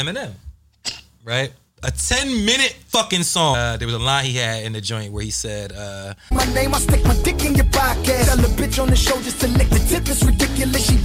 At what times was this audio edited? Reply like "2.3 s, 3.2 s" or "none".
3.5 s